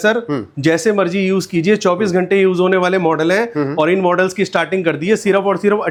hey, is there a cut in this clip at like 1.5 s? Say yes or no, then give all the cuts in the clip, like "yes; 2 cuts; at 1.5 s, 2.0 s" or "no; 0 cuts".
no; 0 cuts